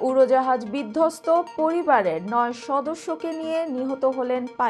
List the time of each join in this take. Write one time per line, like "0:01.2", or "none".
none

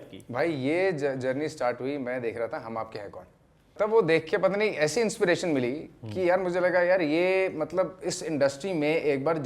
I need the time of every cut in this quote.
0:03.7

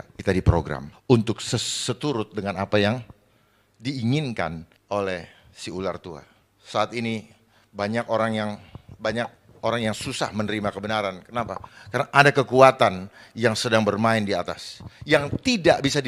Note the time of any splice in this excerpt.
none

